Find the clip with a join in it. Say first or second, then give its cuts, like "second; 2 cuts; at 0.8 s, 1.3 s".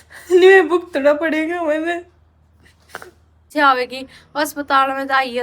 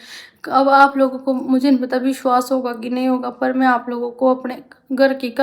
first; 1 cut; at 3.5 s